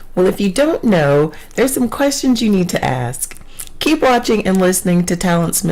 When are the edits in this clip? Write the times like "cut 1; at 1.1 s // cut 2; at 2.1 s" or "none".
cut 1; at 4.8 s